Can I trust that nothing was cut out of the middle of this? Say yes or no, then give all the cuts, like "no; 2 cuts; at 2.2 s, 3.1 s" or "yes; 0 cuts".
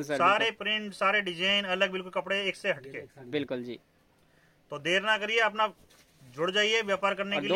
yes; 0 cuts